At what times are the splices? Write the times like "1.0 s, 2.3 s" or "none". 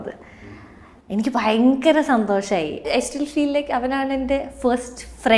2.9 s